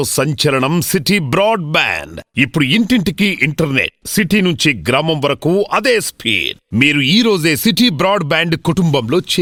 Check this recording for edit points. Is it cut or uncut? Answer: uncut